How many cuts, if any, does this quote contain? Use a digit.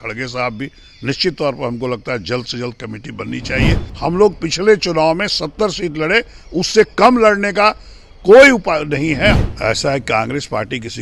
2